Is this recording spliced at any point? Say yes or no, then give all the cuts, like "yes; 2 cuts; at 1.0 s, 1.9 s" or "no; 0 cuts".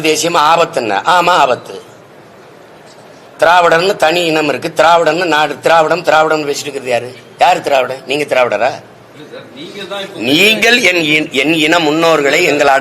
no; 0 cuts